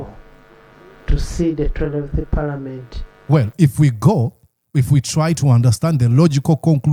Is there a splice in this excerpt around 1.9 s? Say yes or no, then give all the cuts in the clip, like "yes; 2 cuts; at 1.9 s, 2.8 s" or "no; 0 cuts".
no; 0 cuts